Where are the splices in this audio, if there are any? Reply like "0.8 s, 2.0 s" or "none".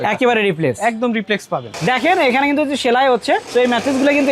1.7 s